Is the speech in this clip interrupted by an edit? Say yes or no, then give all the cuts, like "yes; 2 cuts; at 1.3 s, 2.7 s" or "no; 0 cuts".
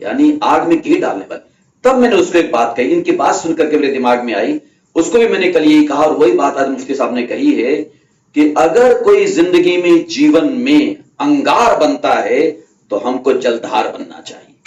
no; 0 cuts